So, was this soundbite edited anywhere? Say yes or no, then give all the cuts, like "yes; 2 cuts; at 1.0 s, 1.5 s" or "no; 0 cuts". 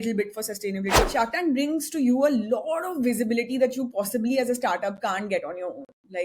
yes; 1 cut; at 0.9 s